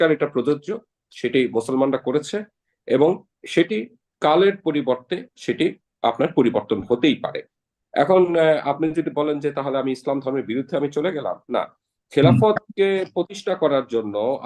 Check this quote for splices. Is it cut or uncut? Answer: uncut